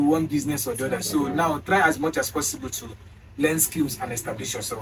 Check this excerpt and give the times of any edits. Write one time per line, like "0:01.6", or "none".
none